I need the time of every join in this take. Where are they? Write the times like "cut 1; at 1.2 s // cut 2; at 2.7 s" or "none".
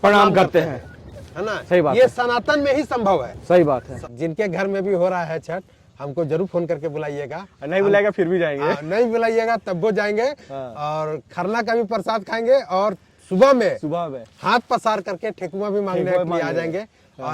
cut 1; at 4.0 s